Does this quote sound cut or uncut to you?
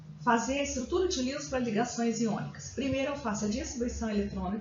cut